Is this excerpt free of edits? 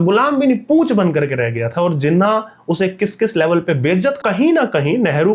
no; 1 cut; at 4.2 s

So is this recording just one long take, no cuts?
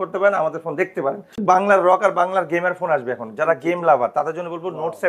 no; 1 cut; at 1.4 s

